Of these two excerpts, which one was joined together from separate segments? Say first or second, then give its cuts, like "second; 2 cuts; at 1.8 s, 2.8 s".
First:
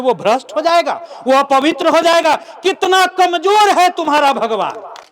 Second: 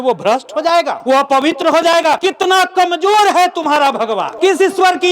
second; 3 cuts; at 0.9 s, 2.2 s, 4.3 s